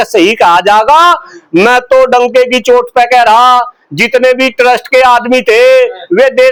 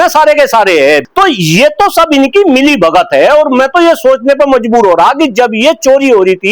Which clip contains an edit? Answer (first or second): second